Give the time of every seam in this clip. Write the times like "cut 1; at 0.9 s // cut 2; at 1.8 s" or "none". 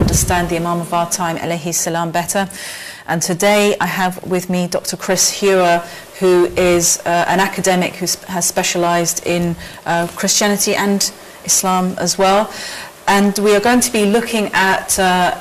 none